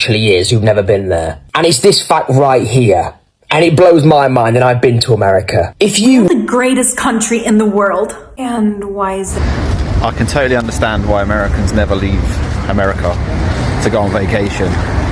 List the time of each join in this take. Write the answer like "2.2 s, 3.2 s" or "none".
6.3 s, 9.3 s